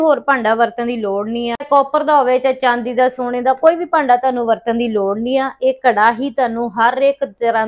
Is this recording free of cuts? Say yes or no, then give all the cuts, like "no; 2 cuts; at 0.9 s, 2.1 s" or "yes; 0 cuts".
yes; 0 cuts